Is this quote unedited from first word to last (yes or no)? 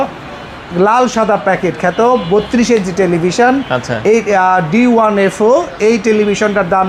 yes